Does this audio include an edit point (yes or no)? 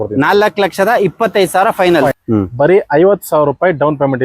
yes